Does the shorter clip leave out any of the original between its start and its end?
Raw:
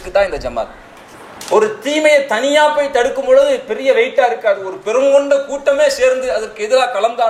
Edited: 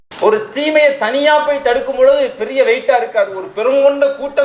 no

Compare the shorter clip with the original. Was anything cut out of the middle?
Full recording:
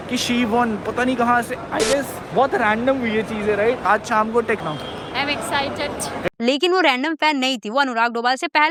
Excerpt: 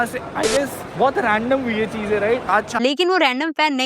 yes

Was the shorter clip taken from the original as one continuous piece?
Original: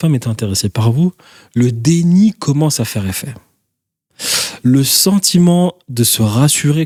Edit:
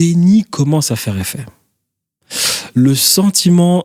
yes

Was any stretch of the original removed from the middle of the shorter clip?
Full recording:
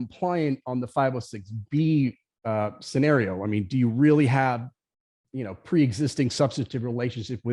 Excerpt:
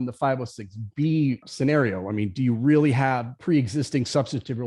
yes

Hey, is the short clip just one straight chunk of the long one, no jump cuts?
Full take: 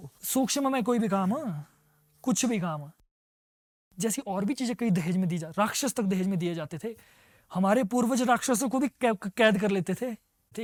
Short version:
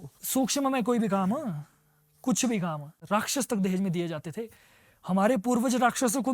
no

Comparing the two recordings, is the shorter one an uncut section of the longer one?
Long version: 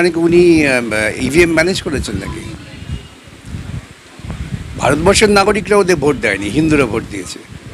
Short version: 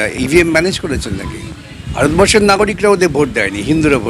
no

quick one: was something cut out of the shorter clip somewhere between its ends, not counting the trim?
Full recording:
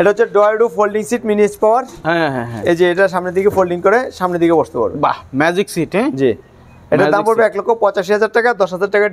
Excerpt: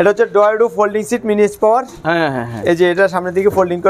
no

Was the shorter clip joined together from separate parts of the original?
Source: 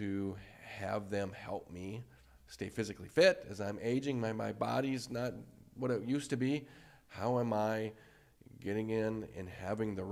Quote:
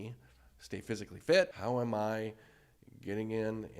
yes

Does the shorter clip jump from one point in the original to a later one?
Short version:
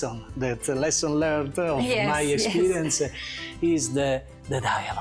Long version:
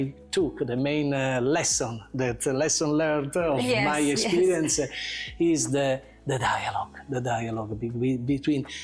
no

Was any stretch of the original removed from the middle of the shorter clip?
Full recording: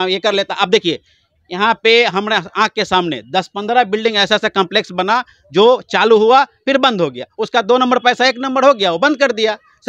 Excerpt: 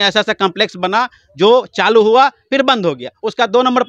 no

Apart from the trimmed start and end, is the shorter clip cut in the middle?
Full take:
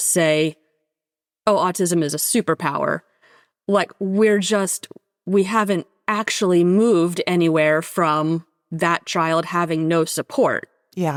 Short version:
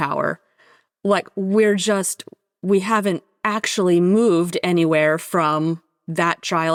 no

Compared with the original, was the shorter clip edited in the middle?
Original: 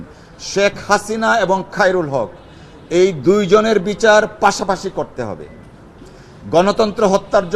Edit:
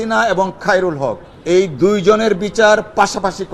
yes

